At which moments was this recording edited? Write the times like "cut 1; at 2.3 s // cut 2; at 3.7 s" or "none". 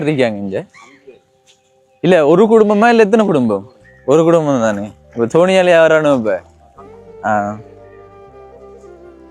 cut 1; at 7.6 s